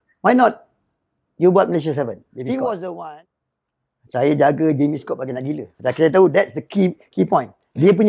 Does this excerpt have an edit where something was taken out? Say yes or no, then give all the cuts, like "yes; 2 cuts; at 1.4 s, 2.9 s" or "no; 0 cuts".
yes; 1 cut; at 3.0 s